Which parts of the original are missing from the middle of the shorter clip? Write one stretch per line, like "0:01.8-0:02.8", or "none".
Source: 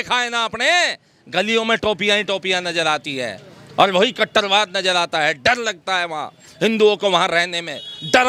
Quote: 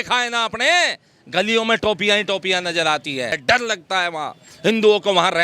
0:03.4-0:05.4